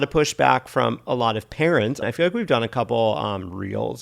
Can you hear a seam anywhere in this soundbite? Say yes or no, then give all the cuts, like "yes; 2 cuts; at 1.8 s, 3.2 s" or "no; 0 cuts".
yes; 1 cut; at 2.0 s